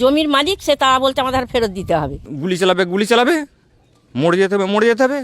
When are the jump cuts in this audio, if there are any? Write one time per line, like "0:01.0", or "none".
0:02.2